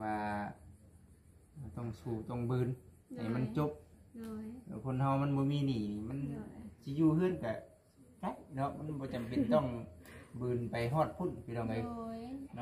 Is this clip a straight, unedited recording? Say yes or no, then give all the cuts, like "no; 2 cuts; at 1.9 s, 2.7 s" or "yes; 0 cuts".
yes; 0 cuts